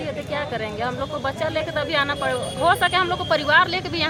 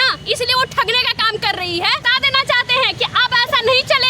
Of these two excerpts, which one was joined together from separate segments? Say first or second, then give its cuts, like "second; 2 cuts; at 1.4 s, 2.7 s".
second; 1 cut; at 2.1 s